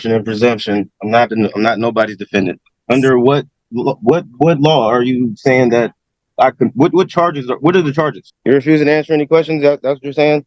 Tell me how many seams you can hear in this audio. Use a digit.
2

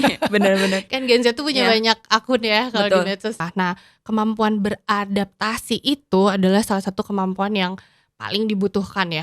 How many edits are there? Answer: 1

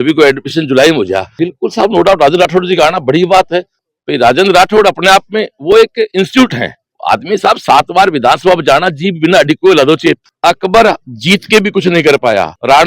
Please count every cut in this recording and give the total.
2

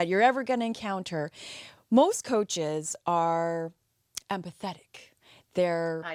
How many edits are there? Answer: 0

